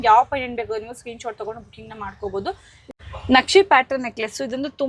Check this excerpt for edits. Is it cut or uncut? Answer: cut